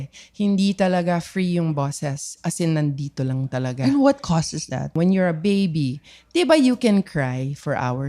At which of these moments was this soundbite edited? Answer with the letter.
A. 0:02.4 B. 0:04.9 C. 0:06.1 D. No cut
B